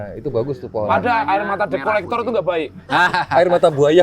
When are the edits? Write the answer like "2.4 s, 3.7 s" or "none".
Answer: 2.8 s